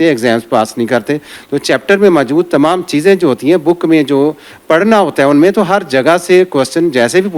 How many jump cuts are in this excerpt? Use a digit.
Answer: 1